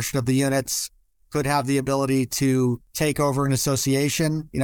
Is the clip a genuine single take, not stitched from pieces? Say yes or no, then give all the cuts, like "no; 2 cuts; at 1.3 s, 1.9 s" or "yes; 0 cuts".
no; 1 cut; at 2.9 s